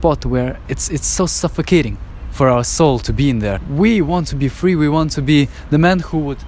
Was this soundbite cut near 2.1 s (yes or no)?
no